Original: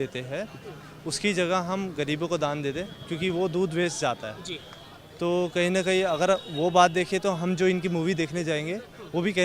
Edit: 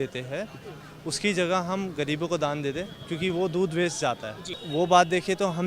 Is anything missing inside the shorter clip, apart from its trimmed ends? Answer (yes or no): yes